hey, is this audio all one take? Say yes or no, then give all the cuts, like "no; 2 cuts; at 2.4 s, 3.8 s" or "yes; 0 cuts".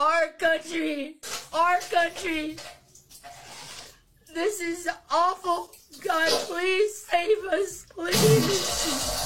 no; 1 cut; at 4.6 s